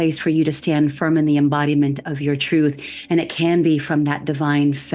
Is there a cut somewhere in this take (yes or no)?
no